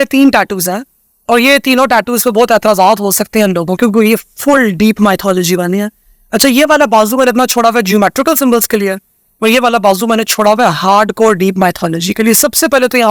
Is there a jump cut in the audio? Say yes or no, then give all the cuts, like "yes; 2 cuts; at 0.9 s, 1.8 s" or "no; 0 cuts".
no; 0 cuts